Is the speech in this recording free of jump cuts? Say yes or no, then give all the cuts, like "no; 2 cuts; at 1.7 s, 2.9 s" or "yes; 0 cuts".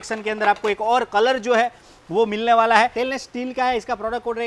no; 1 cut; at 2.9 s